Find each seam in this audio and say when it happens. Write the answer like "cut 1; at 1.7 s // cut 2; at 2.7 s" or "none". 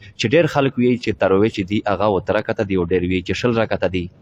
none